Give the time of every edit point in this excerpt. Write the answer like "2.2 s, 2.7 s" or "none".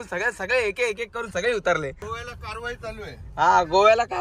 2.1 s